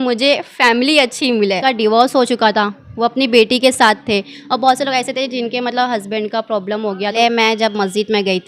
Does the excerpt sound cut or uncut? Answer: cut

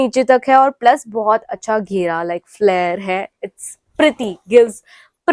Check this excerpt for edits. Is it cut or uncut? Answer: uncut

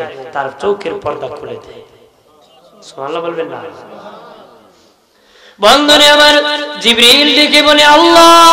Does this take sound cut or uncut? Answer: uncut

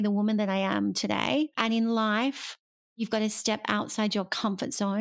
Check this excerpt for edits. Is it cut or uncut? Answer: cut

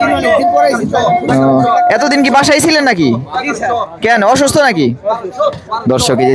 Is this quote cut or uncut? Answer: uncut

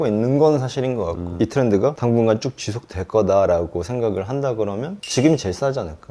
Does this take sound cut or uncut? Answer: cut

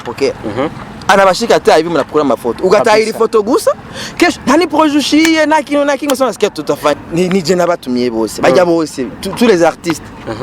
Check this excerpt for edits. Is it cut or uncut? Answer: cut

